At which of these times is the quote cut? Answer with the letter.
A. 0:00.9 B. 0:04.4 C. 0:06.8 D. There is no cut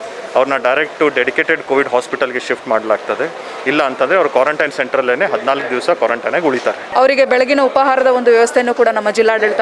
C